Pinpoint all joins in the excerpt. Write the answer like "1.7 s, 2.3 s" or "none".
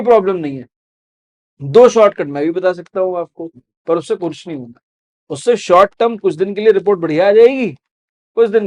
none